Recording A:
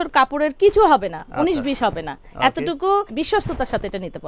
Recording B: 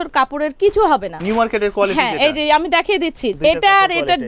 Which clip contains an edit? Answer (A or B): B